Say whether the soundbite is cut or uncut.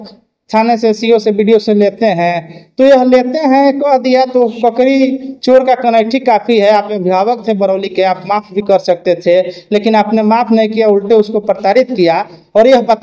uncut